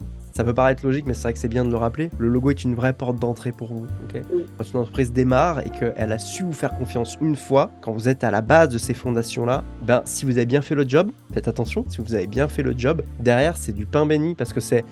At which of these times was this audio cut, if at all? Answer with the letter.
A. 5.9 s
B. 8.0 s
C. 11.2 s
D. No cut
D